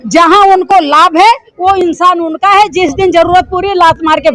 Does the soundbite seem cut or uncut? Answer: uncut